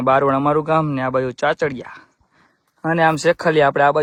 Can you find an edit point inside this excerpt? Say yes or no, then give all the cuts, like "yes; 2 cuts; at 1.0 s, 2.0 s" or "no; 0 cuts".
no; 0 cuts